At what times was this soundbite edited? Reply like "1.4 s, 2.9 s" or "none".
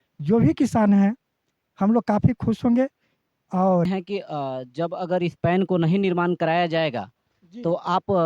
3.9 s